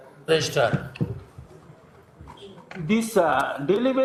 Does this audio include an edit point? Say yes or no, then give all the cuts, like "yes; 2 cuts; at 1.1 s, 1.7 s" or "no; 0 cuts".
no; 0 cuts